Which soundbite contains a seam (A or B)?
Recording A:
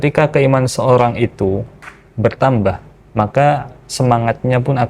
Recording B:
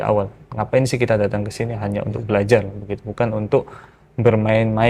A